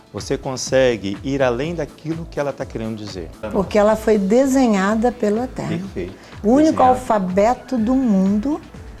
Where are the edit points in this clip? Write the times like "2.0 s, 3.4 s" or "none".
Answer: 3.5 s